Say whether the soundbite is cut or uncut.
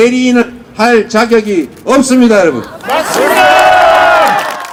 uncut